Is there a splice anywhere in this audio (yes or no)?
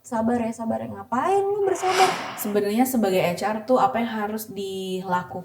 yes